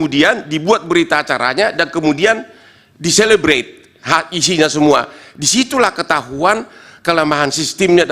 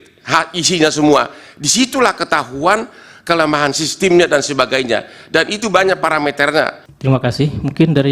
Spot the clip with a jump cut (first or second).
second